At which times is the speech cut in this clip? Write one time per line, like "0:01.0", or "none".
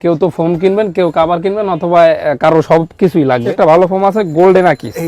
0:03.5